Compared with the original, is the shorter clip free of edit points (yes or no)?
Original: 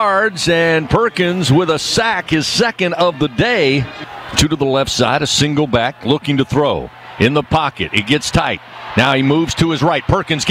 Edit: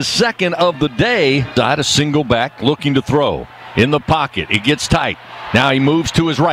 no